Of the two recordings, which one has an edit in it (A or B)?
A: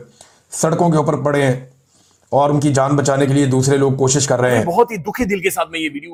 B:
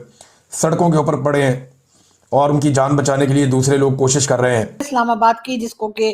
B